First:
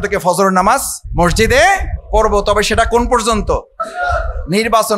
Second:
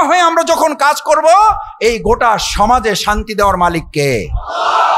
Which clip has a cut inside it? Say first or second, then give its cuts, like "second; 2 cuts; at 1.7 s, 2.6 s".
first; 3 cuts; at 1.0 s, 1.9 s, 3.8 s